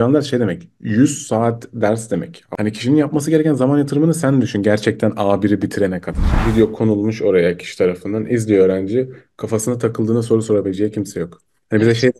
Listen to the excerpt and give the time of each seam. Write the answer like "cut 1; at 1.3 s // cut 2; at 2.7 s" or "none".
cut 1; at 2.5 s // cut 2; at 6.3 s